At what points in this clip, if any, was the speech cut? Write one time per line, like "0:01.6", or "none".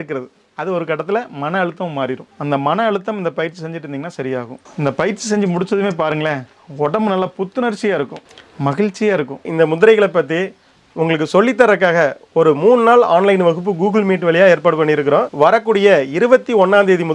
0:04.6
0:09.5